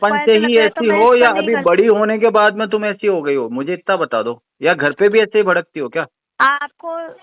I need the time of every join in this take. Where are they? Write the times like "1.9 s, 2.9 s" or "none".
none